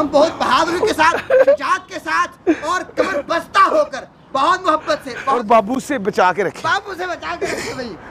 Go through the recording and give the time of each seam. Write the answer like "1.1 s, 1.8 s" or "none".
5.4 s